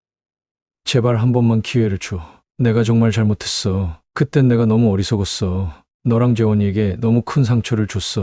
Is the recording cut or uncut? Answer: uncut